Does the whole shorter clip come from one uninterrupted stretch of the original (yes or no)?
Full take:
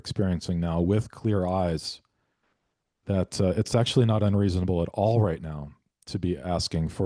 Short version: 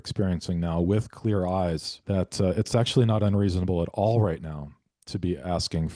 no